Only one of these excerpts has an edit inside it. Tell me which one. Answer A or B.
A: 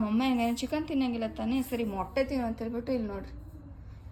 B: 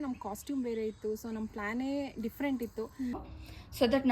B